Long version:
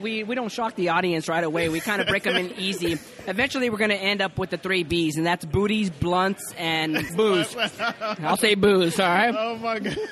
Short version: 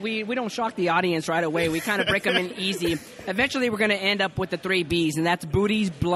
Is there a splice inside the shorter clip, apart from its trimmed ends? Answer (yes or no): no